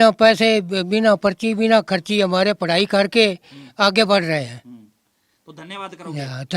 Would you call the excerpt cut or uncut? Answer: uncut